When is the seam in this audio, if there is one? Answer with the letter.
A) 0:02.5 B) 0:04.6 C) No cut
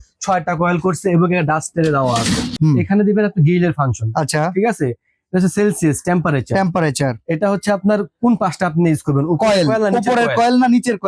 A